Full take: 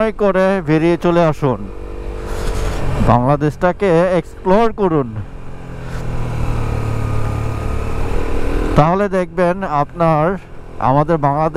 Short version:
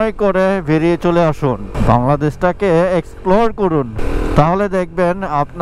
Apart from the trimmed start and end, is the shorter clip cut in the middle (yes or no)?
yes